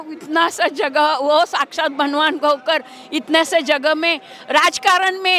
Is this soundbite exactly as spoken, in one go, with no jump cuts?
yes; 0 cuts

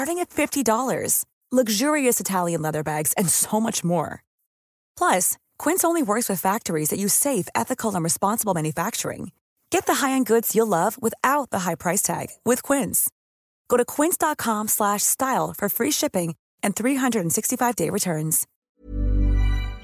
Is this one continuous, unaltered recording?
no; 1 cut; at 18.5 s

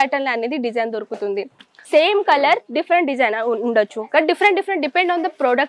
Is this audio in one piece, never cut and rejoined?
no; 1 cut; at 1.8 s

